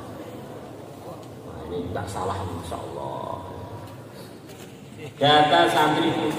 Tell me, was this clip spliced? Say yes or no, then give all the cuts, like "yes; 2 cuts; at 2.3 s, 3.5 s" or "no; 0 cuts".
yes; 1 cut; at 4.5 s